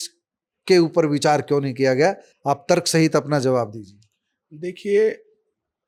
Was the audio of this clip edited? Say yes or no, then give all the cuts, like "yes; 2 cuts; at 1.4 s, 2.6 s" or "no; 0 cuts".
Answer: no; 0 cuts